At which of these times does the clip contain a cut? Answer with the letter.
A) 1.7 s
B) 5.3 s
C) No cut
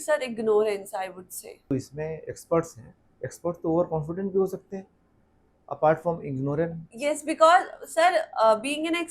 A